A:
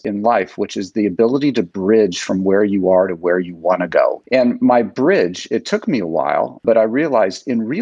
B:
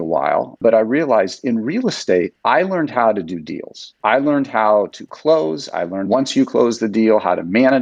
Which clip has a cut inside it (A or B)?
A